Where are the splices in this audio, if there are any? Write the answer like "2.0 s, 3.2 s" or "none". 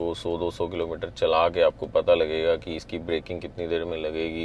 none